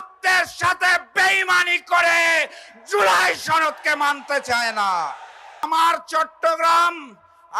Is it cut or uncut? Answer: cut